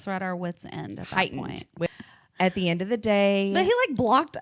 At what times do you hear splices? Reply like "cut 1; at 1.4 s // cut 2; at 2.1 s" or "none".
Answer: cut 1; at 1.9 s